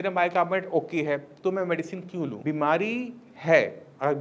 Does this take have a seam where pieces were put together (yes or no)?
yes